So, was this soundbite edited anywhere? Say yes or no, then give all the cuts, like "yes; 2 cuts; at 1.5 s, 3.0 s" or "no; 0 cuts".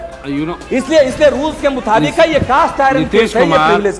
no; 0 cuts